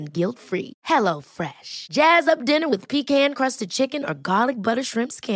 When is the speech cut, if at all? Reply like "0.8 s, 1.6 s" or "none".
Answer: none